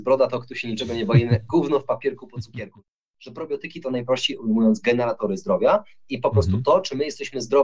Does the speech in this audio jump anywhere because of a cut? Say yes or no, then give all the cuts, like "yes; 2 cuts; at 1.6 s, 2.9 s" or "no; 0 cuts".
yes; 1 cut; at 2.9 s